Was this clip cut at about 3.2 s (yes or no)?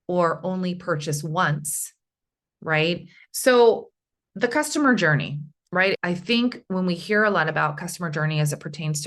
yes